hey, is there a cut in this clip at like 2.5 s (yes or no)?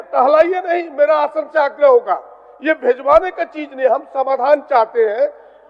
no